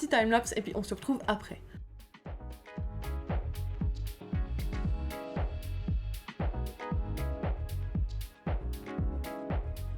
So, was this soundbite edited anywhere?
yes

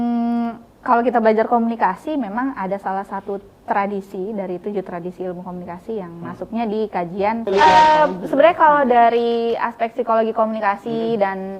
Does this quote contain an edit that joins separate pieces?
yes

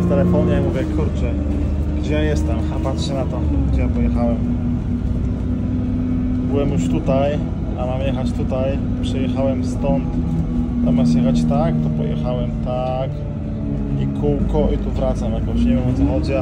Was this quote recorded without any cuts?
yes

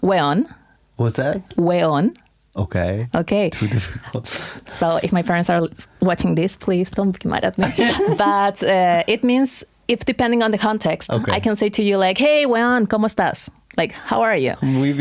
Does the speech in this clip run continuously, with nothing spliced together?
yes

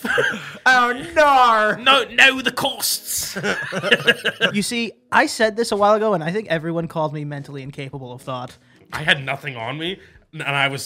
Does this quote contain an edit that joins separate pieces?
yes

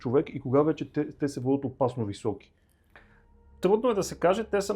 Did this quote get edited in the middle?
no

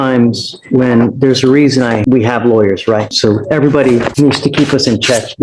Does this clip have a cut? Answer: yes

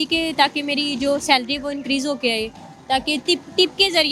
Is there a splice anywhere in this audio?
no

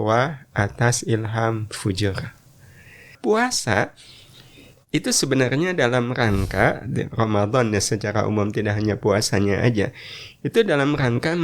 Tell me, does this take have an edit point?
yes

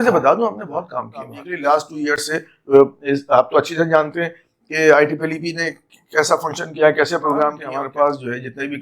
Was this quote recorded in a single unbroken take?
no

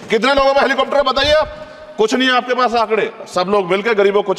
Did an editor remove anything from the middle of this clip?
no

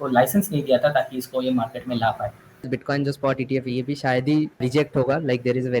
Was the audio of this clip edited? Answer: yes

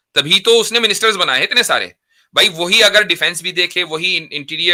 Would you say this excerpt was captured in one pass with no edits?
yes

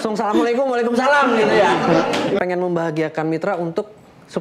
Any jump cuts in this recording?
yes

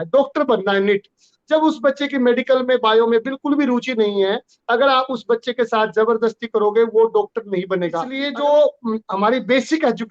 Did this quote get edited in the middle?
yes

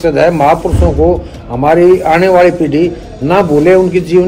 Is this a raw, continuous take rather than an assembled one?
yes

